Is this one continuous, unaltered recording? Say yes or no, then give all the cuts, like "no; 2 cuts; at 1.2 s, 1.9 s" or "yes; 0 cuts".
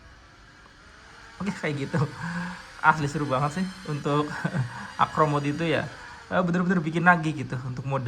yes; 0 cuts